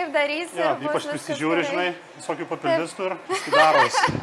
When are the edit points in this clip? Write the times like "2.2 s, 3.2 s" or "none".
3.2 s

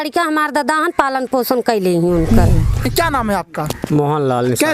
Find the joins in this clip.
2.8 s

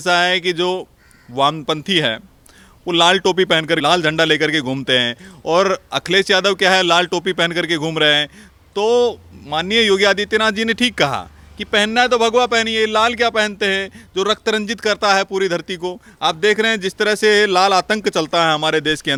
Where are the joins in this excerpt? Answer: none

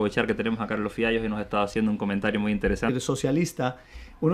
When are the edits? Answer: none

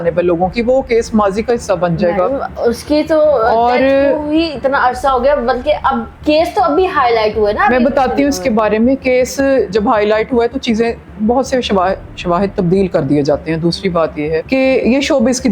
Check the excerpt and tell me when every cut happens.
none

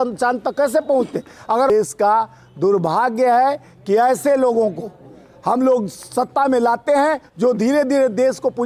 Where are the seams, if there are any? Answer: 1.7 s

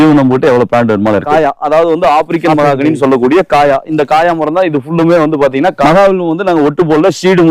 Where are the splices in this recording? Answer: 1.3 s, 5.8 s

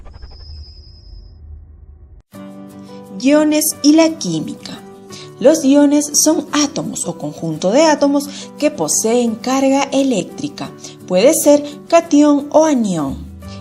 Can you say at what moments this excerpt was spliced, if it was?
2.0 s

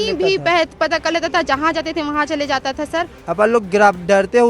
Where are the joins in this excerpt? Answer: 3.2 s

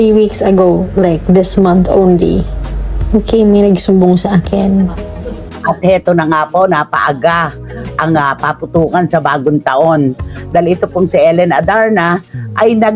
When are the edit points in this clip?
5.5 s

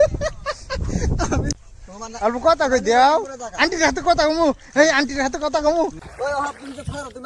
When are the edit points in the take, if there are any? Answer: 1.5 s, 6.0 s

